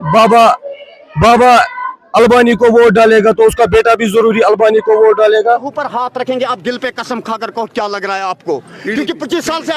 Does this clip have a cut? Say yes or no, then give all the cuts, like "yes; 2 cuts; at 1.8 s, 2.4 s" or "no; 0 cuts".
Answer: yes; 1 cut; at 5.4 s